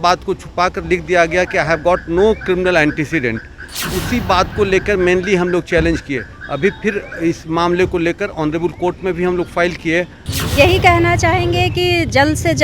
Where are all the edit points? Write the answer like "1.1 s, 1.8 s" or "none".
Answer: 10.2 s